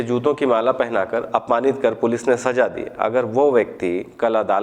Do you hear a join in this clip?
no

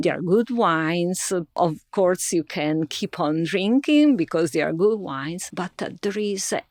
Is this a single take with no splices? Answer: yes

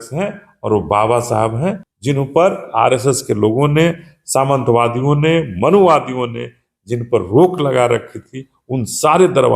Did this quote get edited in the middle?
yes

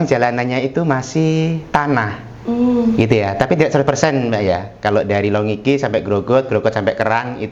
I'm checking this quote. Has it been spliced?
no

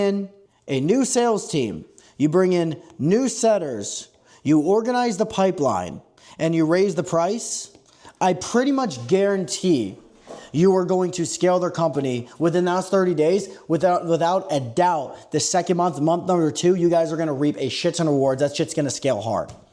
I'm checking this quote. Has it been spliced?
no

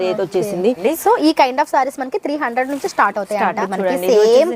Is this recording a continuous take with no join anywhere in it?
no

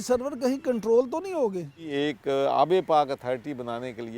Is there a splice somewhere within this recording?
yes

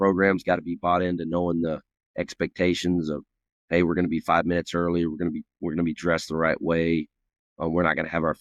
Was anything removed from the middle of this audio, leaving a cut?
no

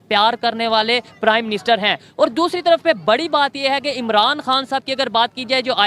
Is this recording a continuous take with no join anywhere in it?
yes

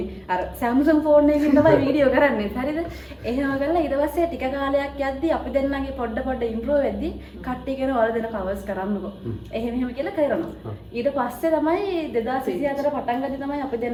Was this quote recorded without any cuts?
yes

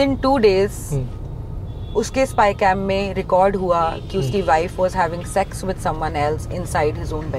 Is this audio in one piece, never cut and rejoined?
yes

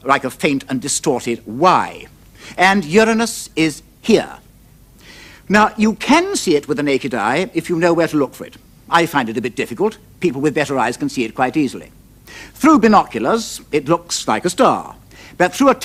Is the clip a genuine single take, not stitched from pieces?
yes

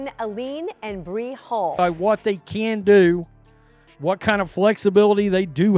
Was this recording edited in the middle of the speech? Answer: yes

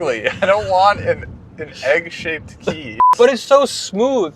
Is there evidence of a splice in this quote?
yes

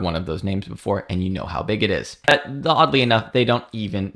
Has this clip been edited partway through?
yes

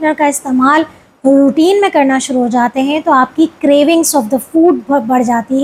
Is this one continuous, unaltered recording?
yes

